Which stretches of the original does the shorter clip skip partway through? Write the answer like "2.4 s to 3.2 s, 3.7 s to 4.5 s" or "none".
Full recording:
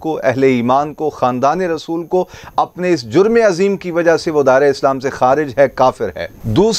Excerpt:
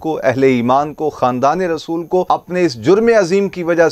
2.2 s to 2.5 s